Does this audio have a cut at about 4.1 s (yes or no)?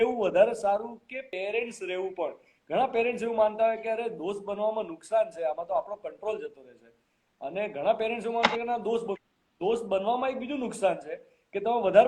no